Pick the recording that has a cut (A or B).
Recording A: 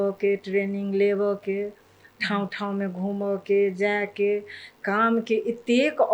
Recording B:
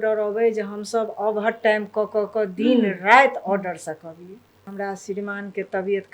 B